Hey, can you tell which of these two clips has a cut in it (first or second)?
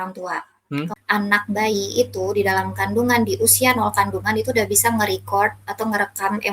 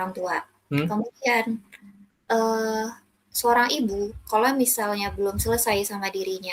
first